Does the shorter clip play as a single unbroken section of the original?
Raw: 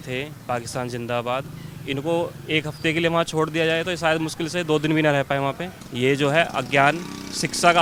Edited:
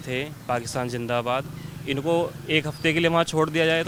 yes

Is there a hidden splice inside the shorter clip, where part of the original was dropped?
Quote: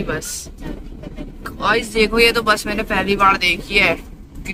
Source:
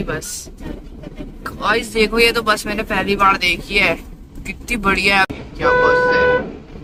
no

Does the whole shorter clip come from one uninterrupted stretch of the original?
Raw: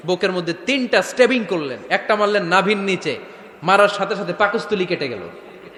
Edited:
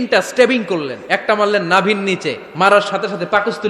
no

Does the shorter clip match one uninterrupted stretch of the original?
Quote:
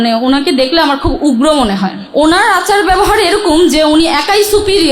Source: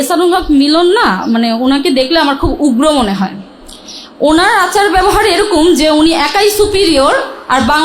no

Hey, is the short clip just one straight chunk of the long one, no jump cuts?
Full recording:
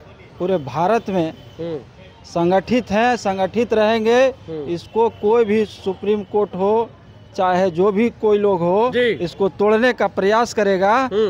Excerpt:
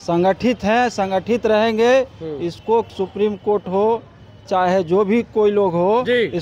no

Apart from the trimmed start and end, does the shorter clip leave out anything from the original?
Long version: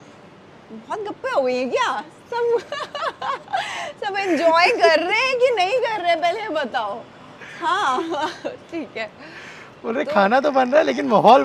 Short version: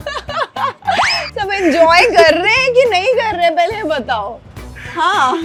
no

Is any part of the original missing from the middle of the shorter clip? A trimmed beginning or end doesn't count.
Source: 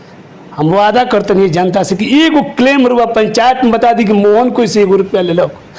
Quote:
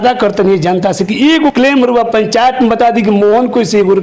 yes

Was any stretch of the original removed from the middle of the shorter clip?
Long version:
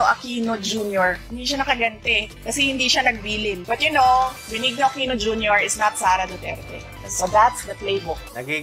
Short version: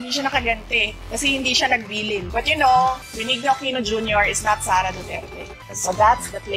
no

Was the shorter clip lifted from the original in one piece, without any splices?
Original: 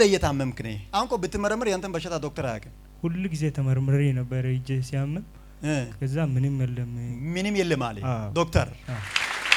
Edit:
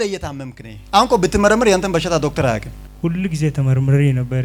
yes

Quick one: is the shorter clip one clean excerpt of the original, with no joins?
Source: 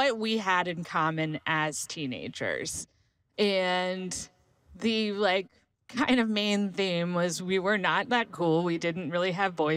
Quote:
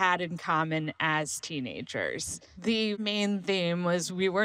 no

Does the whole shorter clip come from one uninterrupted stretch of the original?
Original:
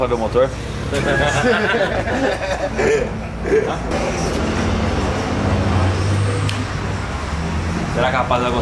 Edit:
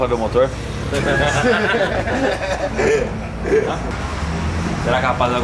no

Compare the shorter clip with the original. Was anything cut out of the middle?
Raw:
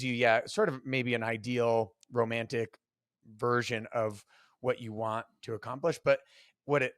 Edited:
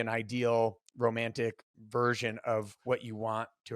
yes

